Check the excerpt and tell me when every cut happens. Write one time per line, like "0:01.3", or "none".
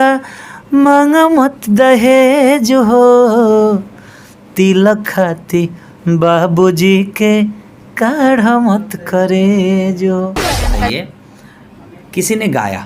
0:10.7